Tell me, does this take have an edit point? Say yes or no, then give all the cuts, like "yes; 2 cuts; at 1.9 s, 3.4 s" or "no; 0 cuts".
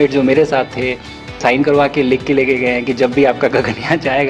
yes; 1 cut; at 1.4 s